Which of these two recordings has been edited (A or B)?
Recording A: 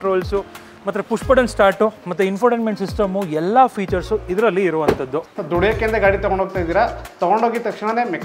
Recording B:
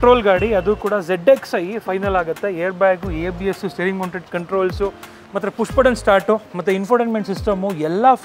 A